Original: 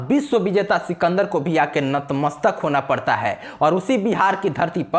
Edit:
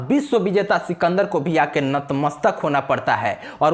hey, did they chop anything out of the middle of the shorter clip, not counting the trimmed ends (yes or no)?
no